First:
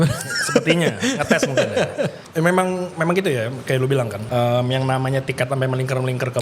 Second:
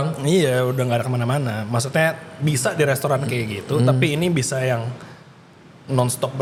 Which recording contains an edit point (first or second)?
first